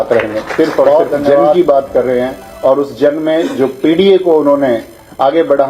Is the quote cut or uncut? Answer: cut